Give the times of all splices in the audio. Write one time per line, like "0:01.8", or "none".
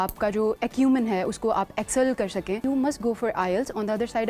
0:02.6